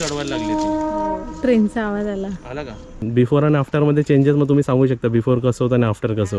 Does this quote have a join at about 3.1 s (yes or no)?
yes